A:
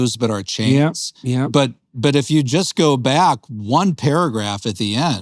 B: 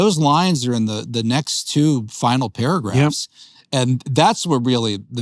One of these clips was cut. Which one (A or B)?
A